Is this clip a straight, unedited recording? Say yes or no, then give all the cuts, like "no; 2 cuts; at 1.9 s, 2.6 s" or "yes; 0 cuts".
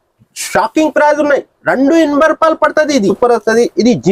no; 1 cut; at 3.1 s